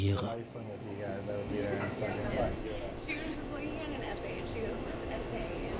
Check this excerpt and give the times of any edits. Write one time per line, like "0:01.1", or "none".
0:03.5